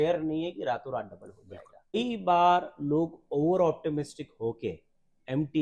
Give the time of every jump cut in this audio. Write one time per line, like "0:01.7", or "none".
0:02.0